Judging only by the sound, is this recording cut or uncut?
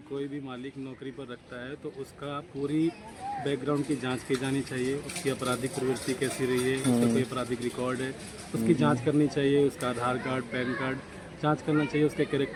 uncut